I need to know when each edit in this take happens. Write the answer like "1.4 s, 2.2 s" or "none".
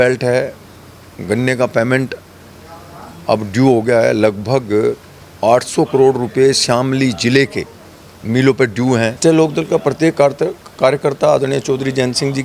9.2 s